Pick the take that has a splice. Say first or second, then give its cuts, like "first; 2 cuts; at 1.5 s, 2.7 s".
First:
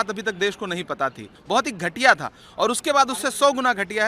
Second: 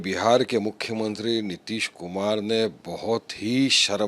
first; 1 cut; at 1.3 s